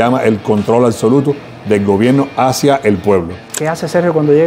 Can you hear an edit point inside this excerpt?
yes; 1 cut; at 3.4 s

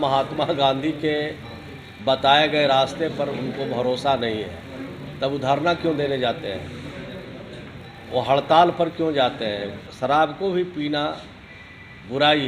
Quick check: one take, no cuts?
no; 1 cut; at 9.8 s

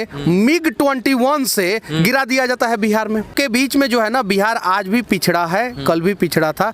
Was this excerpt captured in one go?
no; 1 cut; at 3.3 s

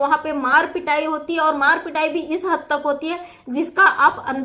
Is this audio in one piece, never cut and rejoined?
yes; 0 cuts

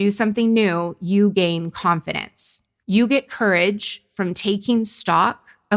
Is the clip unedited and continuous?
yes; 0 cuts

